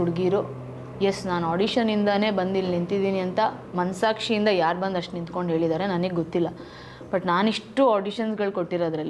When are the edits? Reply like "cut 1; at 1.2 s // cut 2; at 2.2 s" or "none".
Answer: none